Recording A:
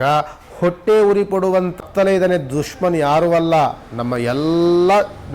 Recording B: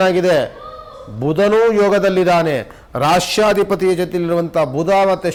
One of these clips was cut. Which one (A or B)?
A